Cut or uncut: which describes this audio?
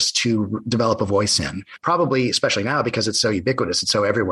cut